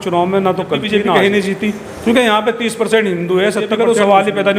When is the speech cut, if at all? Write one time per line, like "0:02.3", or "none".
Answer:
0:01.0
0:03.7